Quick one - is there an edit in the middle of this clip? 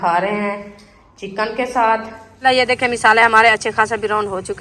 yes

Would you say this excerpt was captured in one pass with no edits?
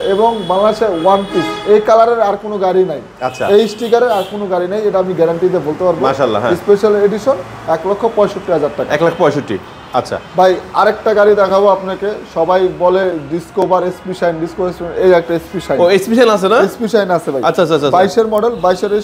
yes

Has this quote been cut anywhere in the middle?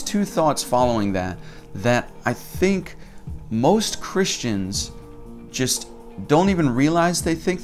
no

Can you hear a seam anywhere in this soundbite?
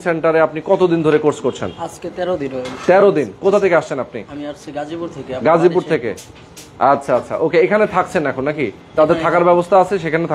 no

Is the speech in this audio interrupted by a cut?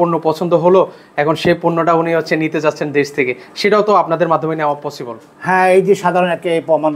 no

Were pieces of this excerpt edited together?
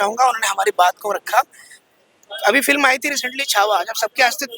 no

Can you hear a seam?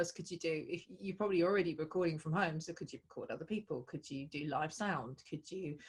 no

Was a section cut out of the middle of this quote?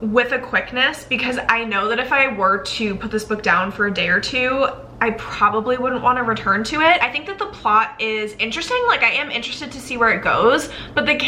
no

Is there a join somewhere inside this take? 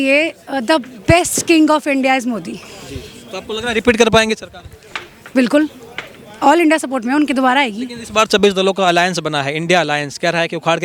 no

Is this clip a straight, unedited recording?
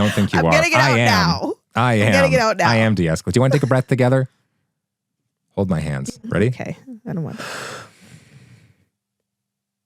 no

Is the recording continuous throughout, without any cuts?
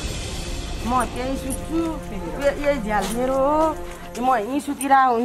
yes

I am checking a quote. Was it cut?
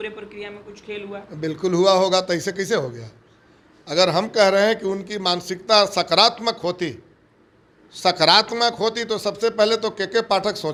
no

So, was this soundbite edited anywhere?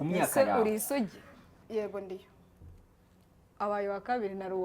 yes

